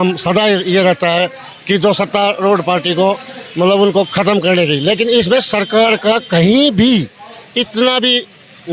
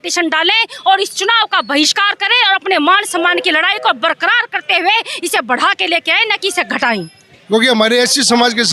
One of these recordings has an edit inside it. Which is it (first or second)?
second